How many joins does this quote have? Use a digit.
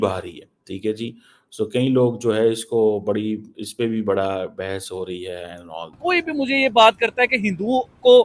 1